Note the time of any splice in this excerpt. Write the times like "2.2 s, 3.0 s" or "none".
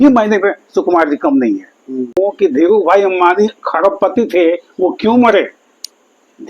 2.2 s